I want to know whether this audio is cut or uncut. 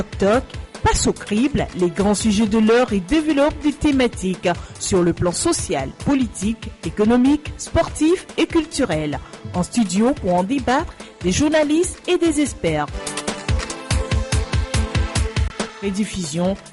uncut